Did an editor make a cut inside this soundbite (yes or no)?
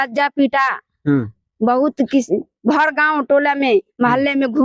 no